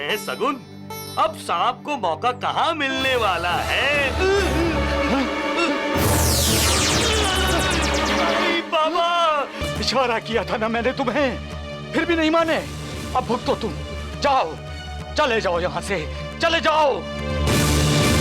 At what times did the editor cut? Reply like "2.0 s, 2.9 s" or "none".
9.6 s